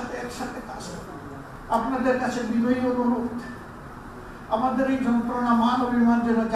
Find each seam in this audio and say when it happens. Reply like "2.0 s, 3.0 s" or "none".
1.5 s